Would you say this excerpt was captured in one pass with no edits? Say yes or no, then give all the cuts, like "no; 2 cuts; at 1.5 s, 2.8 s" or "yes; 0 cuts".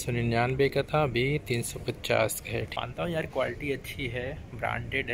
no; 1 cut; at 2.7 s